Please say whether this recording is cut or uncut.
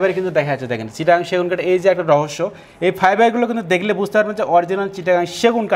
uncut